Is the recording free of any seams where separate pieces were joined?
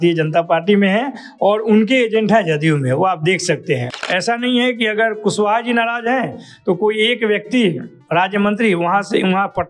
no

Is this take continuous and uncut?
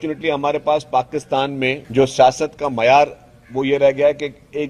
no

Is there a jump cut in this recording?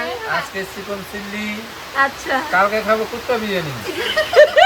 yes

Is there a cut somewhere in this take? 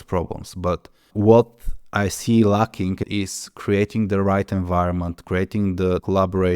yes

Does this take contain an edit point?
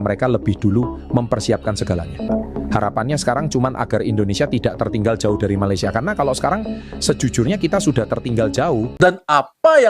yes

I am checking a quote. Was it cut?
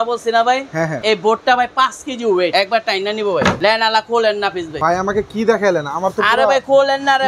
yes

